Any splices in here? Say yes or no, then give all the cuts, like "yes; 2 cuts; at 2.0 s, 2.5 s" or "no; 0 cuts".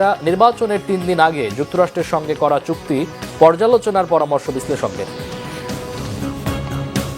yes; 1 cut; at 6.0 s